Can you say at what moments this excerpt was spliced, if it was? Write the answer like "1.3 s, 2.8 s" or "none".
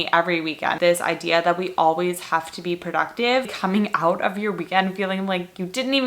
0.8 s, 3.5 s